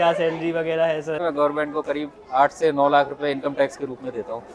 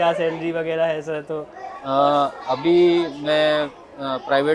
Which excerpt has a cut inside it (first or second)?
first